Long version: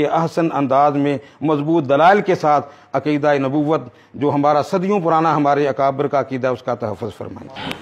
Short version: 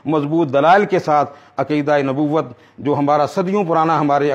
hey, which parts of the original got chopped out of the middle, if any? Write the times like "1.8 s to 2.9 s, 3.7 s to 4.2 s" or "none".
none